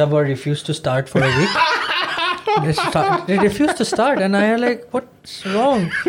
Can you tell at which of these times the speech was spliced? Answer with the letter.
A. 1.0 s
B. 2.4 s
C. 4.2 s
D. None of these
D